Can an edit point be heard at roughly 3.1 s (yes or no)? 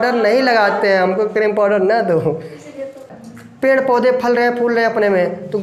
yes